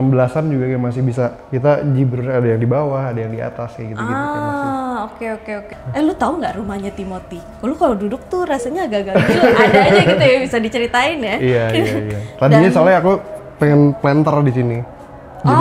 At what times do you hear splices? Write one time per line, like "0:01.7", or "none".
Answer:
0:05.7